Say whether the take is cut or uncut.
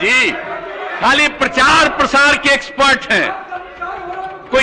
uncut